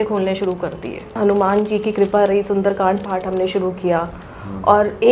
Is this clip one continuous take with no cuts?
no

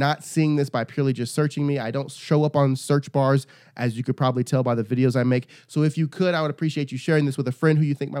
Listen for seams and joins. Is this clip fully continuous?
yes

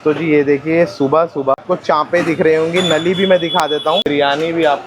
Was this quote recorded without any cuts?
no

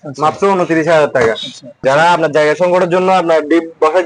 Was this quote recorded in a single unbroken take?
no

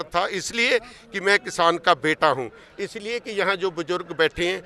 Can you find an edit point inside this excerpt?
no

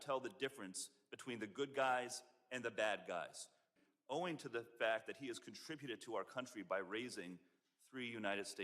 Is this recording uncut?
no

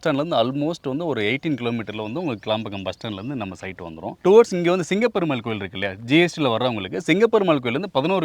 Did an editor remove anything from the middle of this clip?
yes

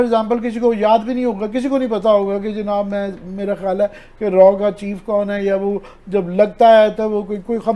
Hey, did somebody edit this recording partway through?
no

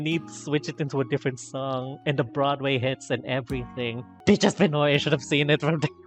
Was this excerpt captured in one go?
no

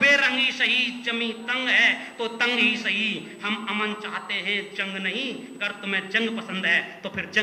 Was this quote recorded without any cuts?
yes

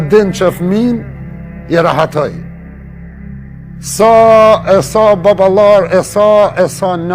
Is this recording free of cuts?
yes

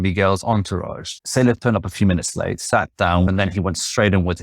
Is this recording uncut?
no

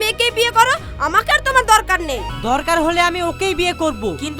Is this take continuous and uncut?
no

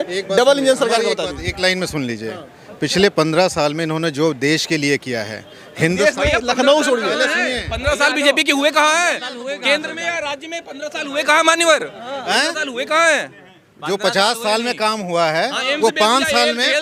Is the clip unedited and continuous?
yes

